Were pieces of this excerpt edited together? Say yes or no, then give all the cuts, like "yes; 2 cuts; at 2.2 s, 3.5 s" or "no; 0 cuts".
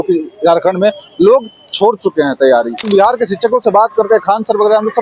yes; 1 cut; at 2.9 s